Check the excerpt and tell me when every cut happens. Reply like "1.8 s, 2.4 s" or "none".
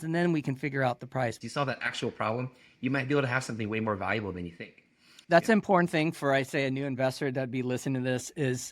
1.4 s, 5.1 s